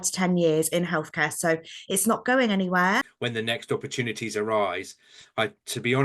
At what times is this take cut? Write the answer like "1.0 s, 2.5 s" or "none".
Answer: 3.2 s